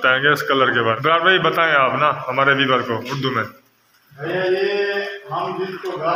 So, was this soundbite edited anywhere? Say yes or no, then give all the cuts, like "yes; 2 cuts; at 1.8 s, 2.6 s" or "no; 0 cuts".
yes; 1 cut; at 1.0 s